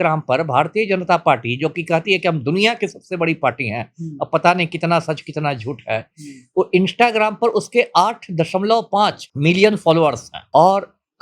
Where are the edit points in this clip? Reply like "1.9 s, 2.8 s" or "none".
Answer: 9.3 s, 10.3 s

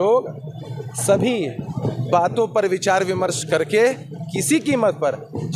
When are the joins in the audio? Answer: none

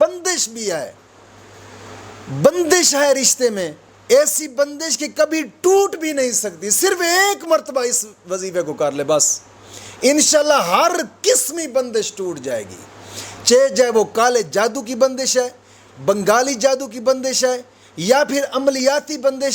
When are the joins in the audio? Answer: none

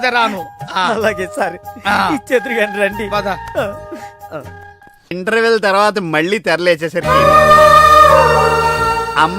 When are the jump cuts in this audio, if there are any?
5.1 s

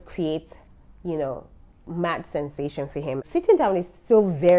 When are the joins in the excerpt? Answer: 3.3 s

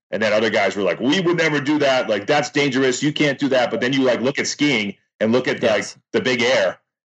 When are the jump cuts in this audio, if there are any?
none

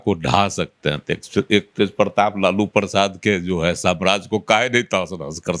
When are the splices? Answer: none

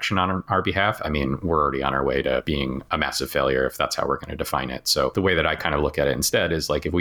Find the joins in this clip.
2.4 s, 5.1 s

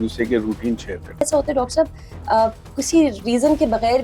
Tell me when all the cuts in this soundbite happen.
1.2 s

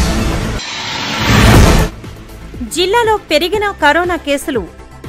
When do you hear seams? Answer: none

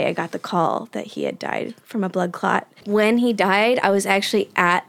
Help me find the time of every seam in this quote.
2.8 s

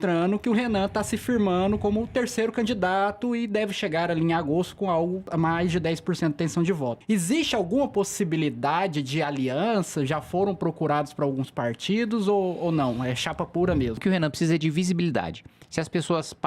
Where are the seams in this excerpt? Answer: 5.3 s, 7.0 s, 14.0 s

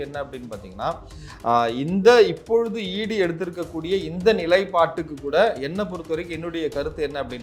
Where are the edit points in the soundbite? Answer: none

